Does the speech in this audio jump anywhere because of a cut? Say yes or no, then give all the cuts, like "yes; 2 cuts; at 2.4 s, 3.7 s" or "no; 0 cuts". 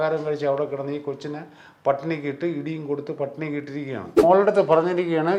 yes; 1 cut; at 4.2 s